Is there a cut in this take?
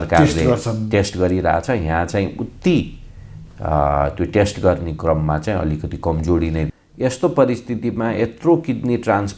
yes; 1 cut; at 6.7 s

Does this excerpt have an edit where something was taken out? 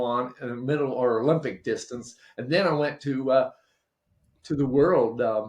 no; 0 cuts

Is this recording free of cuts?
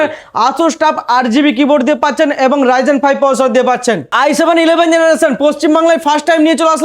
no; 1 cut; at 4.1 s

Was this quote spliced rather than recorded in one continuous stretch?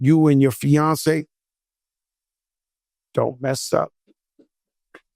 yes; 1 cut; at 4.2 s

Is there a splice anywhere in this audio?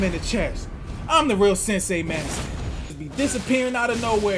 yes; 1 cut; at 3.0 s

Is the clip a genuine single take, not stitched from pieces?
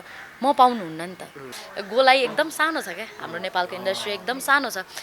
no; 1 cut; at 1.6 s

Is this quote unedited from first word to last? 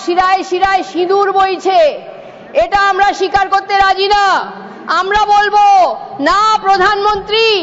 yes; 0 cuts

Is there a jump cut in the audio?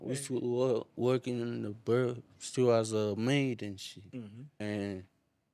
yes; 1 cut; at 4.4 s

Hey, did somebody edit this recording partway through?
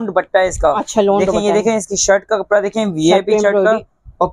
no; 0 cuts

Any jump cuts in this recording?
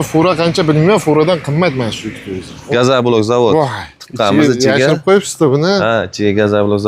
yes; 1 cut; at 2.7 s

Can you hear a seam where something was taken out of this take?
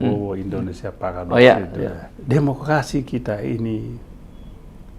yes; 1 cut; at 2.1 s

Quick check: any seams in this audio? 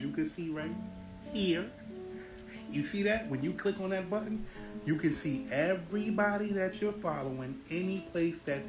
no; 0 cuts

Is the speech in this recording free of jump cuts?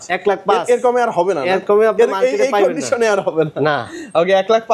yes; 0 cuts

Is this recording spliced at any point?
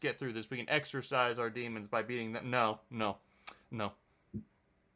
no; 0 cuts

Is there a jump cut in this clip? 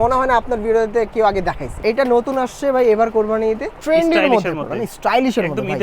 yes; 2 cuts; at 1.7 s, 3.7 s

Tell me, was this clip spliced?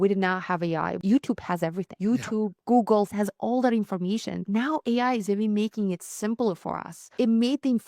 yes; 5 cuts; at 1.0 s, 1.9 s, 3.1 s, 4.5 s, 7.0 s

